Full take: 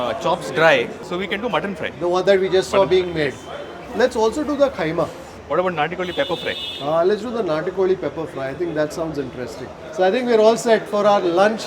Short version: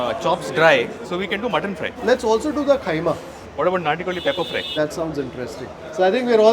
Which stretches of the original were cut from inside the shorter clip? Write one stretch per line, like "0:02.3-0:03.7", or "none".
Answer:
0:01.8-0:03.7
0:06.6-0:08.7